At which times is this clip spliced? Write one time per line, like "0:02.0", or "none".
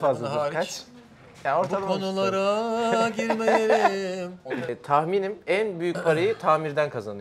0:04.8